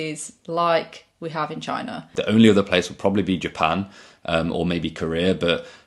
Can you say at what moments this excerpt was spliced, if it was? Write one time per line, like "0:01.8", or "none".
0:02.1